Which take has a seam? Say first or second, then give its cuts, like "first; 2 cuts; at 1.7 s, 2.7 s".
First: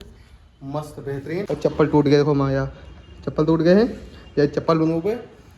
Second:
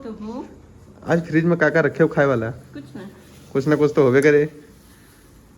first; 1 cut; at 1.5 s